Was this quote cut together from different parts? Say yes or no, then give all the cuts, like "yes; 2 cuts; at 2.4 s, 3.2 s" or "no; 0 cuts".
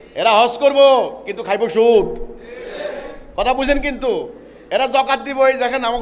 no; 0 cuts